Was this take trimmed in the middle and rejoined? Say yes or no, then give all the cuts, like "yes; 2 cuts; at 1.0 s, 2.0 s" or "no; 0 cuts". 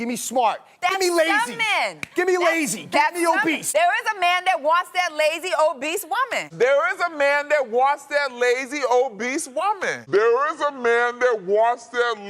yes; 3 cuts; at 3.6 s, 6.4 s, 9.9 s